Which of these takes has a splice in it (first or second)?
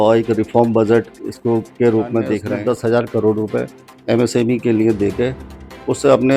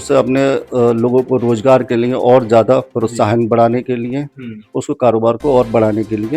first